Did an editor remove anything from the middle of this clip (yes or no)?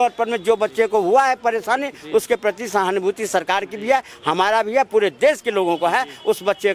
no